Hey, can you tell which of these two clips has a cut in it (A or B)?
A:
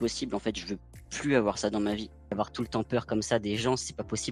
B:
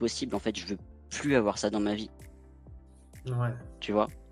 A